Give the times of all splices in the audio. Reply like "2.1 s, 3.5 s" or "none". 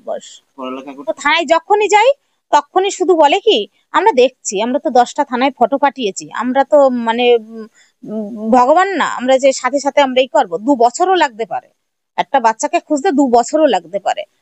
1.2 s